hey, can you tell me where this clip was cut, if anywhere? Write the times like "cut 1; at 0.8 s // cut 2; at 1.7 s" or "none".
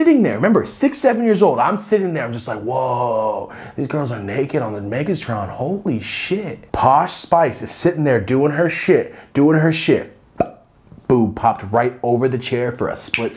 none